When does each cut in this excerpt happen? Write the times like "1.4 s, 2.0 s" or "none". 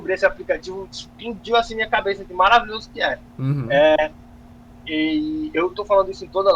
none